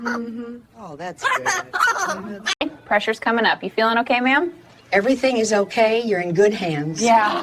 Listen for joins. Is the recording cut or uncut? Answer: cut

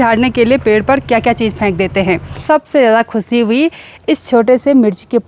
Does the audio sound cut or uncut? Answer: cut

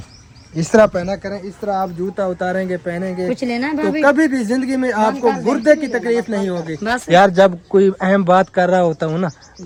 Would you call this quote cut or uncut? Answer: uncut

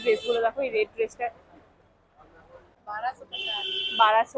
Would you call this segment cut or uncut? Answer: uncut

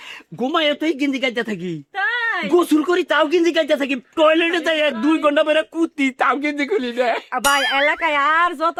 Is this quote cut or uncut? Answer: uncut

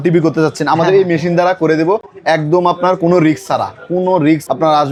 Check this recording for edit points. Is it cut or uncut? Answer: uncut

